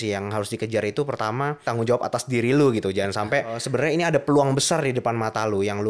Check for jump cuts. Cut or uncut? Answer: cut